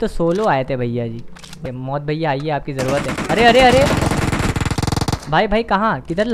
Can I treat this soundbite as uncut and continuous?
no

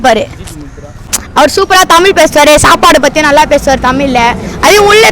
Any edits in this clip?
yes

